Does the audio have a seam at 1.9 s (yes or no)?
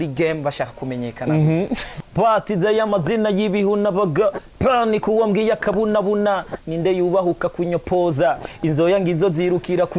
yes